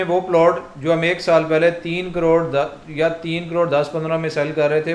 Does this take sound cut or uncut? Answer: uncut